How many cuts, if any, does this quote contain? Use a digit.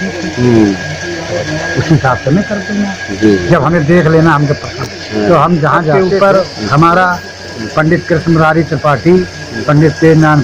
1